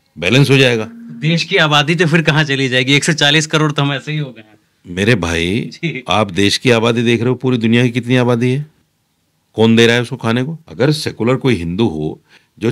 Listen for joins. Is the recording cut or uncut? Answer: cut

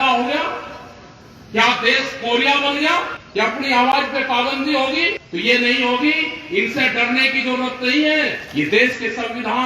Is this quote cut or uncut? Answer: cut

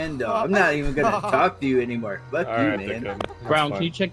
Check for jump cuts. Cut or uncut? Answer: uncut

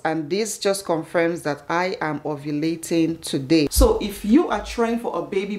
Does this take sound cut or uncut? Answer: cut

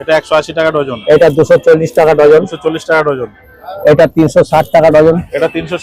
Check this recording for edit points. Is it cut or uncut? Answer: uncut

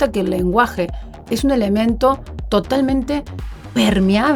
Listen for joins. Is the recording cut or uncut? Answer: uncut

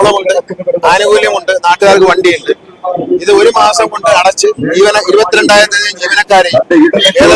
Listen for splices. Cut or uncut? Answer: uncut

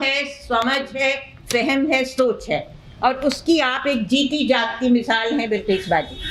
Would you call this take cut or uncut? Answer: uncut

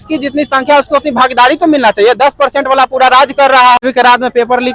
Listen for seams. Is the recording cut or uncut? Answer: cut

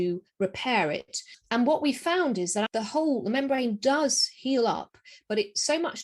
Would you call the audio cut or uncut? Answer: cut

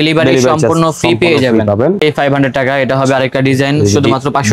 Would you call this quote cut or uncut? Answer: cut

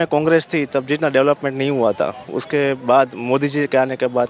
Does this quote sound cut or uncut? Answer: uncut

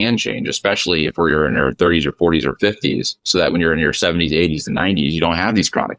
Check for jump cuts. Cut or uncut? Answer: uncut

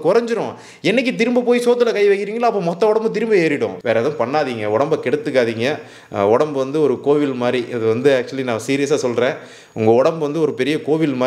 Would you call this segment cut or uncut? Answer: cut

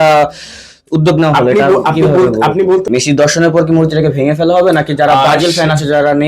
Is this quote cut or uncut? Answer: cut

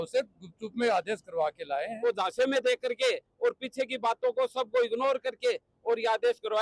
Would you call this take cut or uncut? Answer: cut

